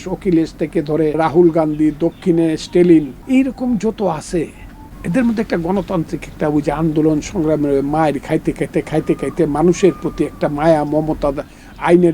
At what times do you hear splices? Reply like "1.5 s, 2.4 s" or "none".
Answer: 1.2 s, 3.2 s